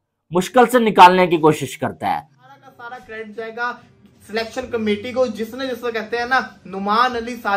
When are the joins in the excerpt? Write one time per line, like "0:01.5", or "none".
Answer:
0:02.5